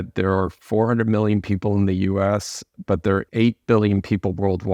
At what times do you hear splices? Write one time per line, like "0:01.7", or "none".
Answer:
0:03.3